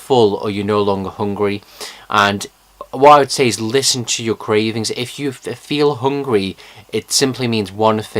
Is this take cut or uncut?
uncut